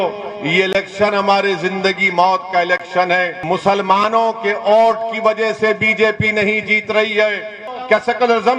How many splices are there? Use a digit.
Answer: 2